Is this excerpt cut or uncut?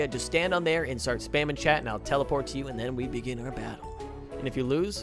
uncut